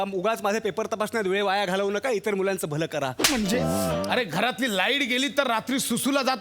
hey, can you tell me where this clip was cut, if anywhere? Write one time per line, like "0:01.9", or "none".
0:04.1